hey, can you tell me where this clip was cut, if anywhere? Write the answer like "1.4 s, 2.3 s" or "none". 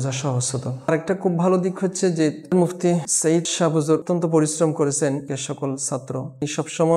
none